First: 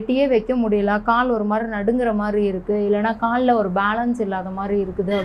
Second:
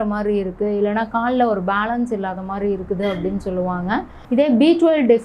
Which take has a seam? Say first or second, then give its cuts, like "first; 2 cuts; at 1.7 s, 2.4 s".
second; 1 cut; at 4.2 s